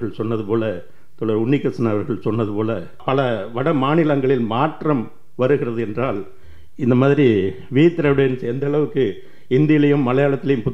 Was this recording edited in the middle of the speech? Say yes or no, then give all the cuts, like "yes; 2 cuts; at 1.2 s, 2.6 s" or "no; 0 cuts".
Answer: yes; 1 cut; at 3.0 s